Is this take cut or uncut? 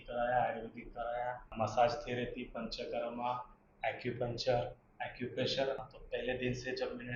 cut